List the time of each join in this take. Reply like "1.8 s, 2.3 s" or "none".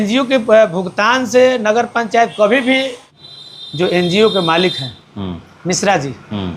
3.1 s